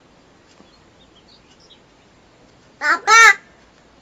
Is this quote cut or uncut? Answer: cut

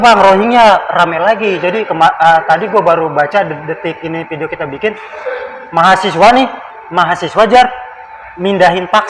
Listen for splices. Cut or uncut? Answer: uncut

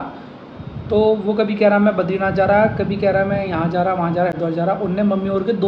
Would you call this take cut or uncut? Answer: uncut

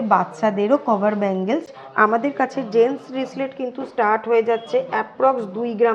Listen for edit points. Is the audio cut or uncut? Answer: cut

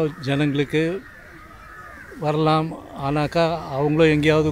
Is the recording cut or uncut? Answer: uncut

